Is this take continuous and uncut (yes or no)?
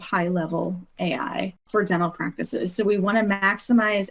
no